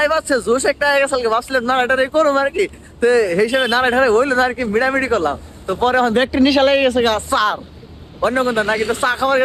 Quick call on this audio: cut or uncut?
uncut